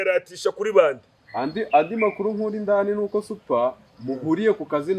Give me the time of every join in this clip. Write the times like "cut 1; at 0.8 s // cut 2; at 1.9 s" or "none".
none